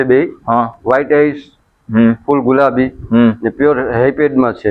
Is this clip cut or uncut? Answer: uncut